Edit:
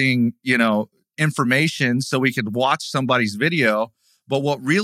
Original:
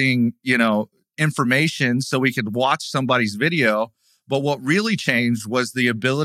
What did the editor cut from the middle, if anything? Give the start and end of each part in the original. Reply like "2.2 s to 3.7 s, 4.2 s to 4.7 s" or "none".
none